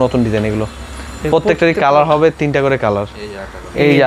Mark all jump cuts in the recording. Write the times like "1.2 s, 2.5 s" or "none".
none